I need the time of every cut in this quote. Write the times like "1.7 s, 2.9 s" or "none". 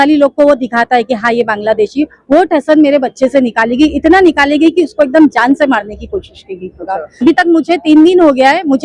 7.2 s